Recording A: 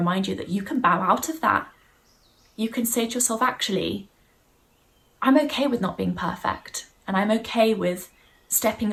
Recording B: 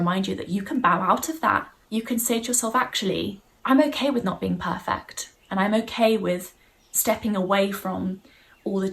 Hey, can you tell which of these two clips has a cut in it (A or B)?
B